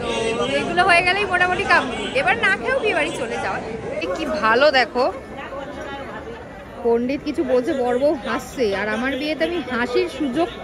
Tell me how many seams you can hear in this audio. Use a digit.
1